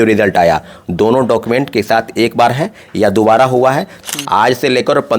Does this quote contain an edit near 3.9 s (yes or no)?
yes